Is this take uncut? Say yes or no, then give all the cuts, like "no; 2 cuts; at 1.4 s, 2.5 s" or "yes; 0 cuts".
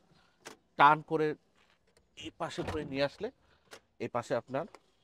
yes; 0 cuts